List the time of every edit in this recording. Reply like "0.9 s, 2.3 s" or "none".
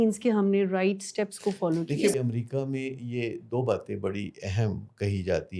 2.1 s